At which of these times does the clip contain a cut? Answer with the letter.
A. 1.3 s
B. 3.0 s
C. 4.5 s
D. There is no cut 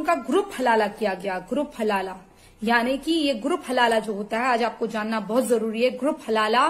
D